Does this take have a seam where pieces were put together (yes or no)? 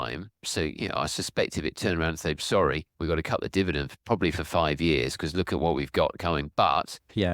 no